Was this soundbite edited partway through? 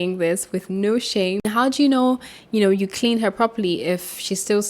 yes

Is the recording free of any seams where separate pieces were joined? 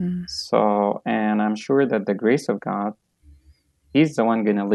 yes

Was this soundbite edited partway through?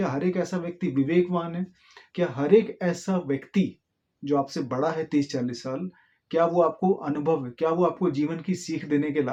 no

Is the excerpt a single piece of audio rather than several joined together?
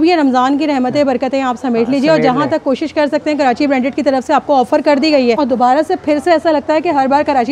no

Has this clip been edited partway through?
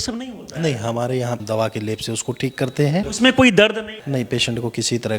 yes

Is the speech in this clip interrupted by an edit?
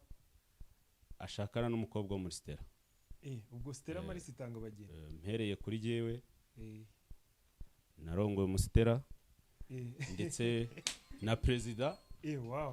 no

